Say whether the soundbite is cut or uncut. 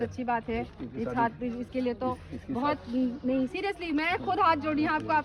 uncut